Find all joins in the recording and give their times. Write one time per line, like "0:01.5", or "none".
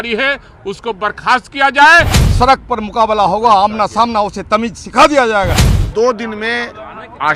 0:02.2
0:05.6